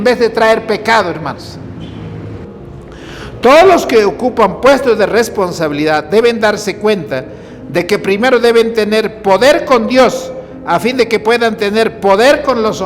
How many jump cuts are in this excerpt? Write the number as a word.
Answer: one